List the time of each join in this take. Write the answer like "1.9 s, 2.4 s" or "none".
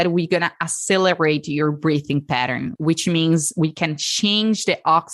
2.8 s